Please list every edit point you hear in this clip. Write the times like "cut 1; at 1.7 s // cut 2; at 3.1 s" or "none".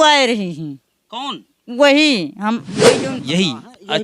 cut 1; at 2.7 s